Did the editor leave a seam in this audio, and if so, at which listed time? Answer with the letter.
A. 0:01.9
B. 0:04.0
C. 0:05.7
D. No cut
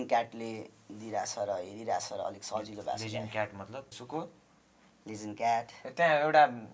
B